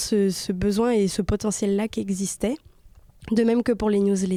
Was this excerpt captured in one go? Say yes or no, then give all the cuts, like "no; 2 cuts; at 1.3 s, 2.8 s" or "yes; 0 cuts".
yes; 0 cuts